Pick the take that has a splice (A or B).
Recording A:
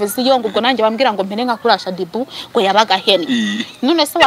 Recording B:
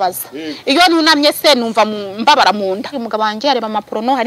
B